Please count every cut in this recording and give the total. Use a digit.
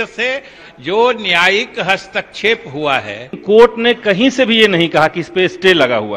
1